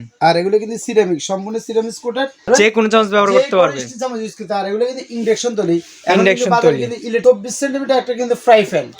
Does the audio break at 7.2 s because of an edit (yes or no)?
yes